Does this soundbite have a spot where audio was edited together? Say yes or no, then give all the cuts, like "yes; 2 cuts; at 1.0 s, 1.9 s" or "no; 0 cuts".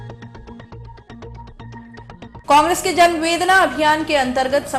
yes; 1 cut; at 2.4 s